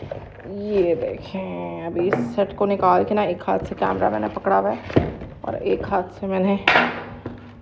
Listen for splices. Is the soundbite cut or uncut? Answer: uncut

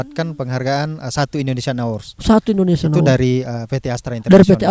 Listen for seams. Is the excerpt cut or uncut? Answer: uncut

